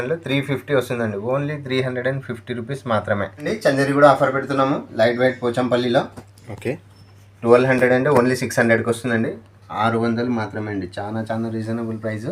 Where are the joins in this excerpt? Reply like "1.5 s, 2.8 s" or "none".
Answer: 3.4 s

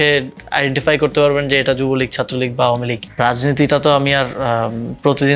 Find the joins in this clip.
3.0 s

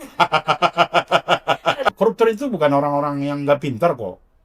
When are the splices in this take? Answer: 1.9 s

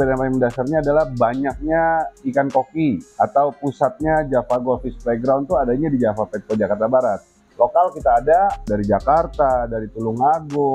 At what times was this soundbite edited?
7.5 s

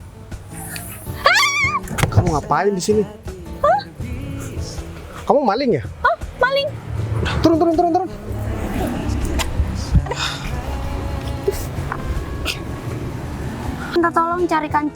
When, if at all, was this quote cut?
14.0 s

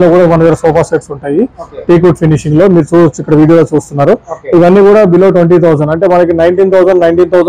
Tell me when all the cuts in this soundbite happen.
none

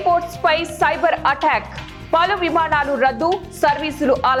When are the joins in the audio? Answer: none

